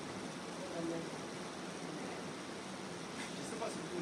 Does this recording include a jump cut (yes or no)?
no